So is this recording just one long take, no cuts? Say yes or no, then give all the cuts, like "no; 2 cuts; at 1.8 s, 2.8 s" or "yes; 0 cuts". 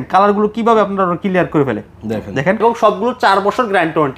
no; 1 cut; at 2.6 s